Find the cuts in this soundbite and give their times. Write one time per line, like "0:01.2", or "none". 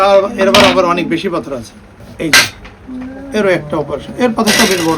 0:02.1